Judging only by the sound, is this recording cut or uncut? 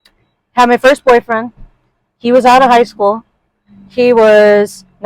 uncut